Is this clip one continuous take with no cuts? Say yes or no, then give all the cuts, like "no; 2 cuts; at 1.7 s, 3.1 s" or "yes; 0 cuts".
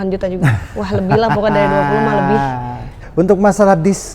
no; 1 cut; at 3.0 s